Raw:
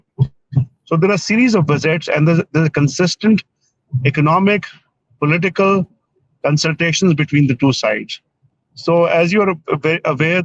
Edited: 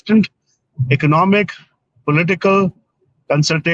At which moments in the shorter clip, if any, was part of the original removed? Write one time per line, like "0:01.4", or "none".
none